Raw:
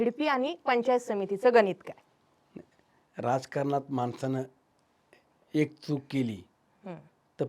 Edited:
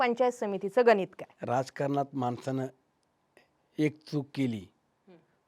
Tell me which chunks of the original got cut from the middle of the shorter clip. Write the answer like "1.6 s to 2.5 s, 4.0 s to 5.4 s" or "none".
1.9 s to 3.0 s